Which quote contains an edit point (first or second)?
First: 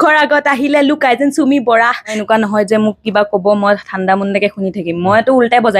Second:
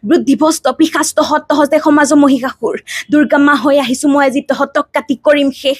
first